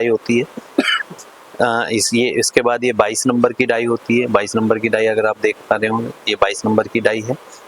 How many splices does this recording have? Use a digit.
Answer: 0